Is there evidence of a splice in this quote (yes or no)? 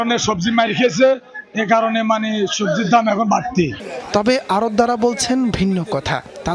no